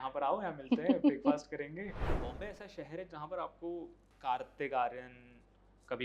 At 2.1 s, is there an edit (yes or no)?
yes